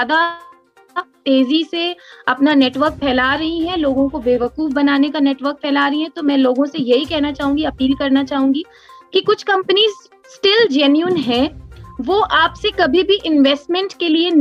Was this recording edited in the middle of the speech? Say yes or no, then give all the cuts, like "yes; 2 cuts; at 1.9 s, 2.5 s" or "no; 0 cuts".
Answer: no; 0 cuts